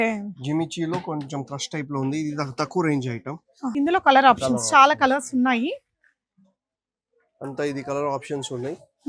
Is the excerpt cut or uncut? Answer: cut